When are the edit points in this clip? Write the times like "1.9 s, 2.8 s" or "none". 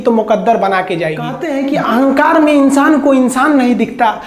1.5 s